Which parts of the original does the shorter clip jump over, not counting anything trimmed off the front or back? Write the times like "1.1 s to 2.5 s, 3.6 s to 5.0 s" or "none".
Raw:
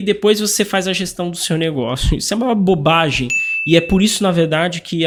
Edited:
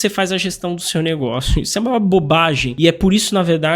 3.2 s to 3.5 s